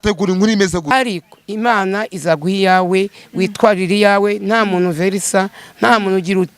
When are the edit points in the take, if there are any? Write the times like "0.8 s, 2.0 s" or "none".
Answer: 0.9 s